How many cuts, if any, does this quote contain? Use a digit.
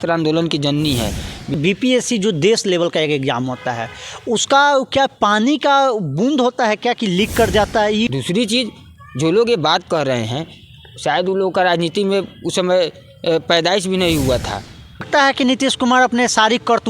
3